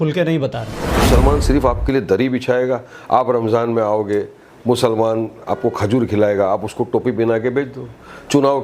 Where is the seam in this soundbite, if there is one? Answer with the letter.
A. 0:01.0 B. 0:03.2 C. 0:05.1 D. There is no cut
A